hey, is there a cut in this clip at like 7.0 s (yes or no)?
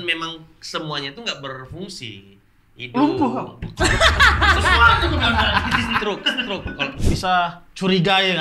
yes